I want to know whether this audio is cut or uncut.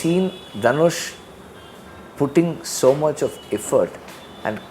uncut